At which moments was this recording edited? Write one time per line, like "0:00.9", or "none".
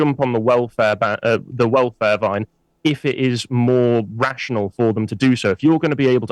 none